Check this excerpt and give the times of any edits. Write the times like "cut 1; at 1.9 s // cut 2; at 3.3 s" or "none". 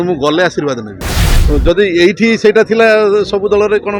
cut 1; at 1.3 s